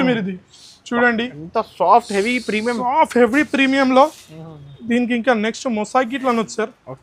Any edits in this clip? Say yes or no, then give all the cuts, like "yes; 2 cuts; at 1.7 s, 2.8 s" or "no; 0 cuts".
no; 0 cuts